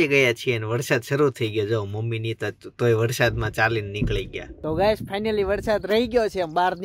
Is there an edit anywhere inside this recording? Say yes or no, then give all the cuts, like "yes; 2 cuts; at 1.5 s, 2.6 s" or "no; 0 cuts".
no; 0 cuts